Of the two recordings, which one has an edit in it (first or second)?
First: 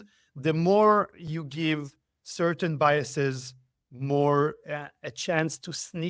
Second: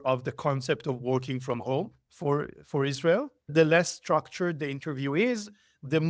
second